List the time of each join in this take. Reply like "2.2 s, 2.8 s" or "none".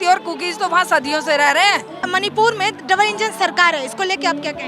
2.0 s